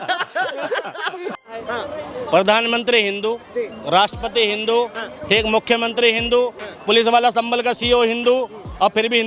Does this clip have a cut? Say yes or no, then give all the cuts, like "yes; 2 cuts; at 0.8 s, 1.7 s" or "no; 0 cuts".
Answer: no; 0 cuts